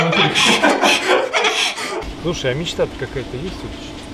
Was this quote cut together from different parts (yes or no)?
yes